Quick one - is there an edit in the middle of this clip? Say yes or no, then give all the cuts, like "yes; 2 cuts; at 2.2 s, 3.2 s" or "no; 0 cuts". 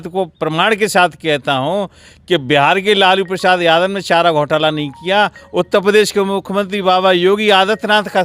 no; 0 cuts